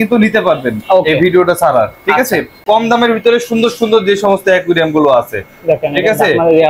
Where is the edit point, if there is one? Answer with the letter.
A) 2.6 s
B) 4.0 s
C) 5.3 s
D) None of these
A